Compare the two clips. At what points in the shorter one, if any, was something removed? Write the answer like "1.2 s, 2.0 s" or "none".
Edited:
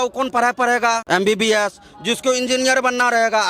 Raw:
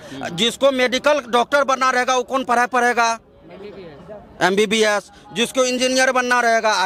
1.0 s